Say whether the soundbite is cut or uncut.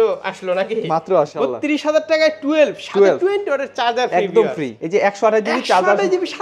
cut